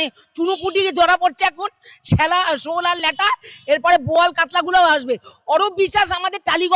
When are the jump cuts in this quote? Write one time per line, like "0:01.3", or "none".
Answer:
none